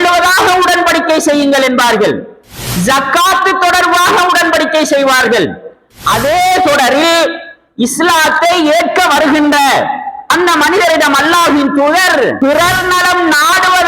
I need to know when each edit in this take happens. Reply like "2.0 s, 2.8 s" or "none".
12.4 s